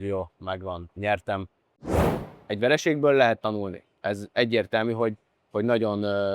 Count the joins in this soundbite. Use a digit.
1